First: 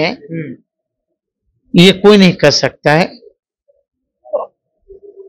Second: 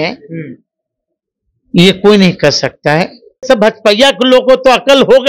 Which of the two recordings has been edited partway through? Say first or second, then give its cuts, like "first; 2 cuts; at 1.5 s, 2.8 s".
second; 1 cut; at 3.4 s